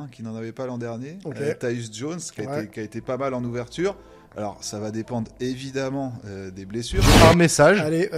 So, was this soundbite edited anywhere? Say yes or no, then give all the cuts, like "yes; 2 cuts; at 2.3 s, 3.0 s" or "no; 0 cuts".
yes; 1 cut; at 7.0 s